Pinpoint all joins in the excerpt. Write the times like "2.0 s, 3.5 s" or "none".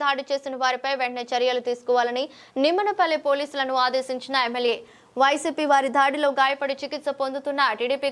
none